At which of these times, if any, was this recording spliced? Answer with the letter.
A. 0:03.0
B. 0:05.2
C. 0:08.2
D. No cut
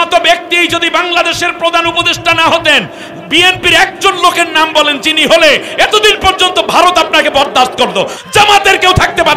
C